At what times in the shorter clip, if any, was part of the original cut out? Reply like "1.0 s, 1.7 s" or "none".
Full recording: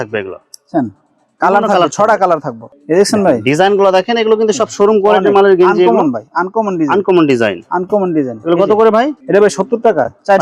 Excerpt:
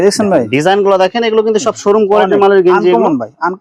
none